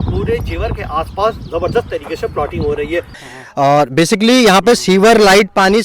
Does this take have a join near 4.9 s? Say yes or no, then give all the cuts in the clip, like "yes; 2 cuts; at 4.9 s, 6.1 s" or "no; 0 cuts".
no; 1 cut; at 3.2 s